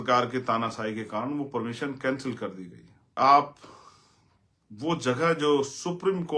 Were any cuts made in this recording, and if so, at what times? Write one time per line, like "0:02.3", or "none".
0:03.1